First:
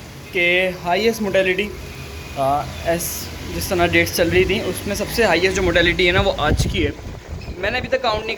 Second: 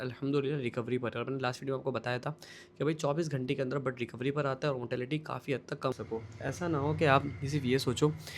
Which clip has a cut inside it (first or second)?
second